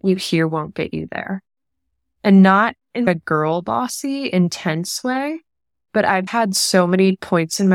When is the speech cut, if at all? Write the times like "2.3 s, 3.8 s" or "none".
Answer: 6.3 s

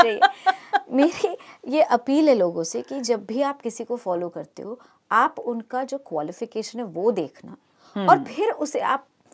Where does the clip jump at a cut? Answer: none

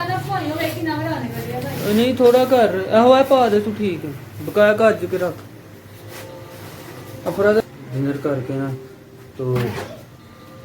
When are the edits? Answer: 7.6 s

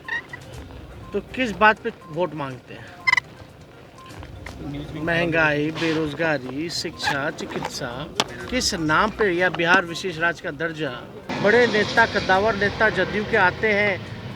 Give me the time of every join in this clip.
11.2 s

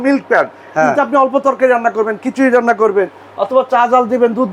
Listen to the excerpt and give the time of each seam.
none

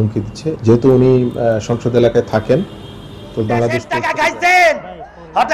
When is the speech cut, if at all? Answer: 3.9 s

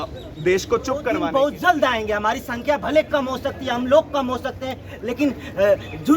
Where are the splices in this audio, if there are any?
1.2 s

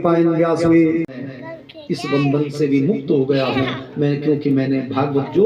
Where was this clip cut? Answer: 1.1 s

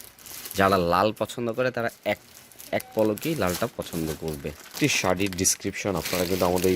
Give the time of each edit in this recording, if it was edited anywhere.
4.7 s

